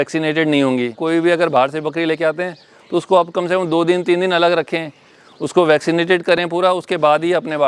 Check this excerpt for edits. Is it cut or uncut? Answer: cut